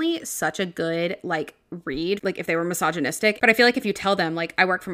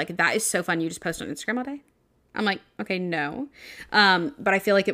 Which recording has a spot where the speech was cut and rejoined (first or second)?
first